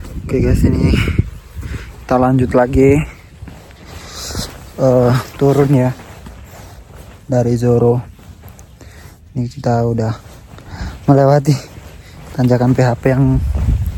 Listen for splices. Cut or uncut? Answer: uncut